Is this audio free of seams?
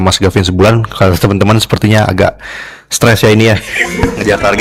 yes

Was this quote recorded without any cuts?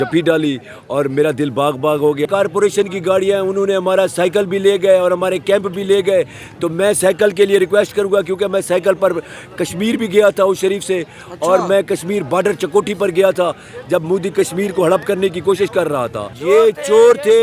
no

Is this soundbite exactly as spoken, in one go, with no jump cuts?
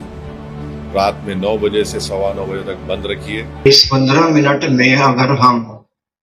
no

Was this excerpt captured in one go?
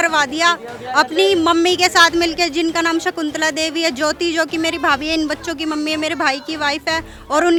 yes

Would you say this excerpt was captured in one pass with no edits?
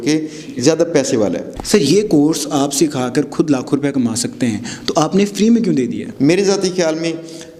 no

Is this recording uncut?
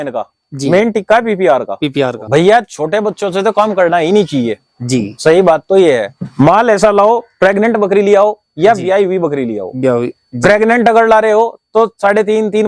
no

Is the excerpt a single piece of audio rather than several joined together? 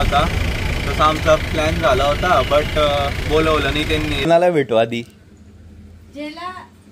no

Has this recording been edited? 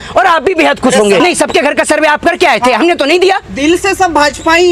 yes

